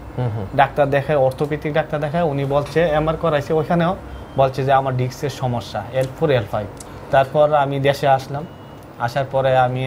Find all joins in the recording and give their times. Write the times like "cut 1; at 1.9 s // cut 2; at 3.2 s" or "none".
cut 1; at 6.7 s